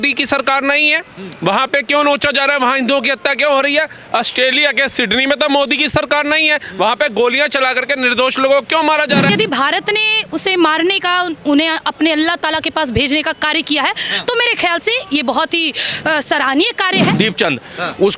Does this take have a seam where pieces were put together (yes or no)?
yes